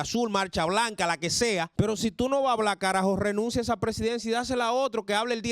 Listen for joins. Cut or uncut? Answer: cut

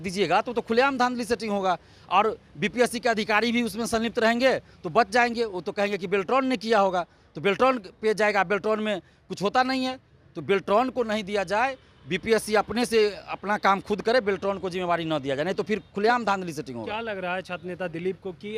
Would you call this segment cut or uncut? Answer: uncut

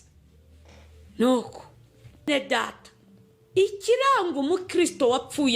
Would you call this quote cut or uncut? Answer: cut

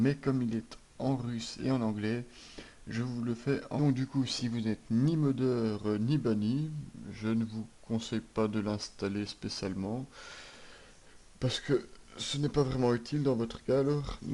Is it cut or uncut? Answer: uncut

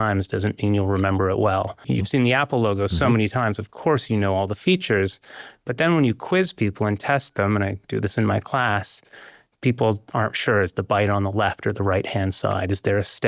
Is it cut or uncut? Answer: cut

